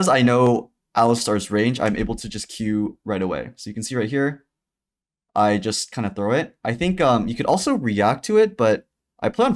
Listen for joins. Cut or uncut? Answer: uncut